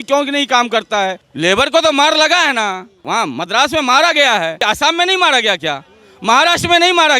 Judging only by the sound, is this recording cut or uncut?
cut